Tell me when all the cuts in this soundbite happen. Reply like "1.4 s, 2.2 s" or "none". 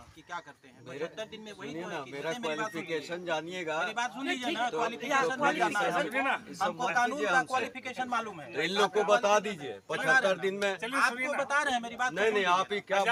none